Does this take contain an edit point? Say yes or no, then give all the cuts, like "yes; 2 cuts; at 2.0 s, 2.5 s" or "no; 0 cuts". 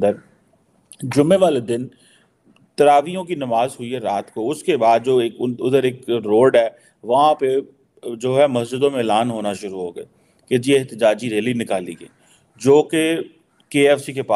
no; 0 cuts